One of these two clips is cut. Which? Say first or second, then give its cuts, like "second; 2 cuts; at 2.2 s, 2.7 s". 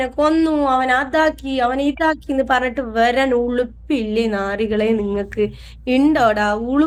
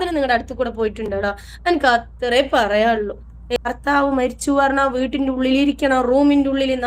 second; 1 cut; at 3.6 s